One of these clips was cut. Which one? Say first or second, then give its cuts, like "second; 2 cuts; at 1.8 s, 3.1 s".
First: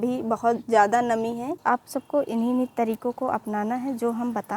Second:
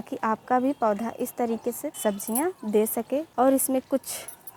first; 1 cut; at 1.6 s